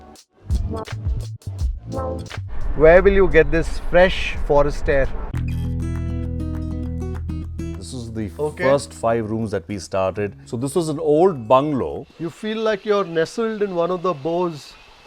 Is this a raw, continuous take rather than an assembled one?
no; 4 cuts; at 2.6 s, 5.2 s, 7.8 s, 12.1 s

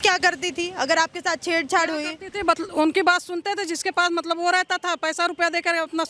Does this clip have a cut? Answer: no; 0 cuts

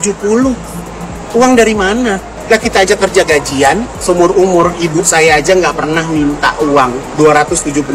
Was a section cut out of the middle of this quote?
yes; 3 cuts; at 2.3 s, 3.9 s, 7.0 s

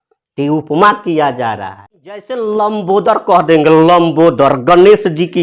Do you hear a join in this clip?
yes; 1 cut; at 2.3 s

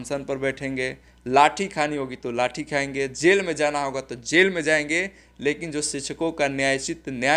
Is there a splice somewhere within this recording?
no; 0 cuts

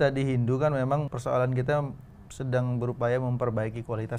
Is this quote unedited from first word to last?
no; 1 cut; at 1.1 s

